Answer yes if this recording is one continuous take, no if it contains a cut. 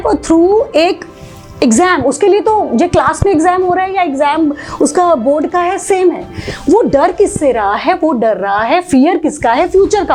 yes